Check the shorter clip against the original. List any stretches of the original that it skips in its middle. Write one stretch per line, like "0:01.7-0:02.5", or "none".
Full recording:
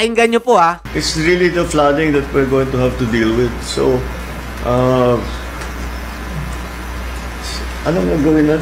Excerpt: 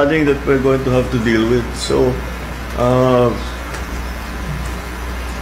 none